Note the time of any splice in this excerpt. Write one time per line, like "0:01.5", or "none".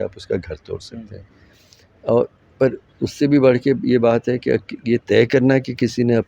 none